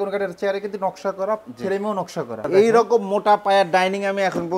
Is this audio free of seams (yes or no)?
no